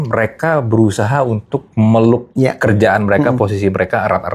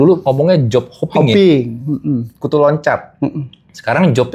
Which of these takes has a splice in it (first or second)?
first